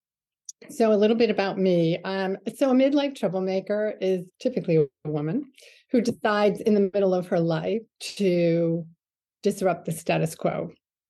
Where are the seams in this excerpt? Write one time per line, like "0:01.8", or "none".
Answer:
0:04.3